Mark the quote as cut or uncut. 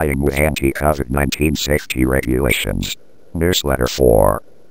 cut